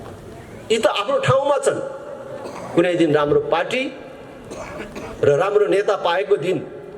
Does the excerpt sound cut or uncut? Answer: uncut